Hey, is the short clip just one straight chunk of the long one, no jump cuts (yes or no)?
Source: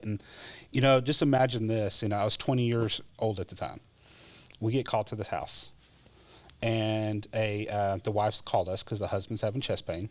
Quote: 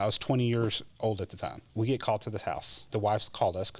no